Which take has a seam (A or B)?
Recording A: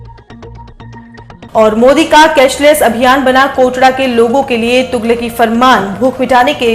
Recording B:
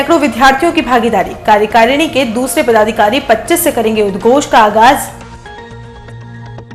A